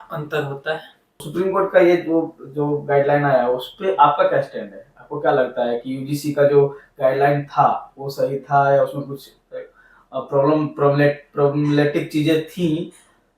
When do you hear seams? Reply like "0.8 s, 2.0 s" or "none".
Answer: 1.3 s